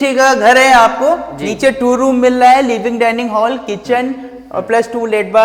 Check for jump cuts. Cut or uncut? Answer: uncut